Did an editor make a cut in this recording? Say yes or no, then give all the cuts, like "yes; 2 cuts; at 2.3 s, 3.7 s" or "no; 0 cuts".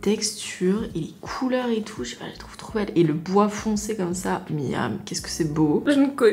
no; 0 cuts